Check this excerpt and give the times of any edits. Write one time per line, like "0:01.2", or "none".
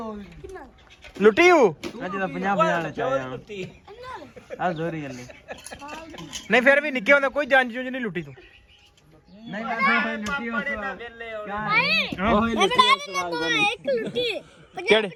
none